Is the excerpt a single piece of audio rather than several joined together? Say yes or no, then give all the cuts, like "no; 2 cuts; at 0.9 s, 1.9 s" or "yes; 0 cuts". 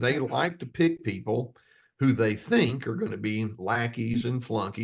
yes; 0 cuts